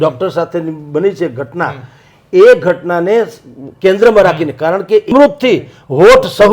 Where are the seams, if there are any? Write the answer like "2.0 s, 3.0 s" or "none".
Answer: 5.1 s